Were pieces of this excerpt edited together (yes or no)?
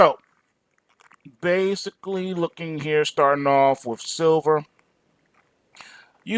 yes